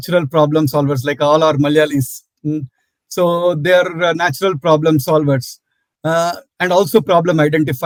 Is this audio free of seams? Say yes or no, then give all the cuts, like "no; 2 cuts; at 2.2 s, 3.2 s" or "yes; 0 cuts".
yes; 0 cuts